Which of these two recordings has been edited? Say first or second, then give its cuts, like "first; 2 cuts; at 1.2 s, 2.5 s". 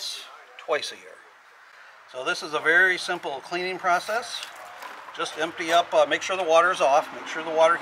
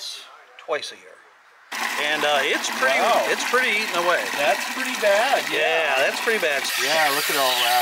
second; 2 cuts; at 1.7 s, 6.6 s